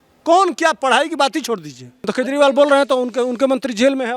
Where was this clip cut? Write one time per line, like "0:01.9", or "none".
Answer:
0:02.1